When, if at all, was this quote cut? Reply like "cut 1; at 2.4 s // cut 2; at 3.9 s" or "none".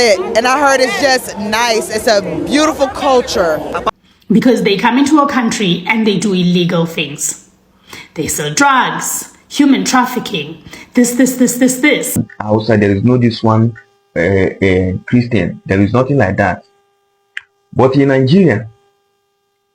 cut 1; at 3.9 s // cut 2; at 12.2 s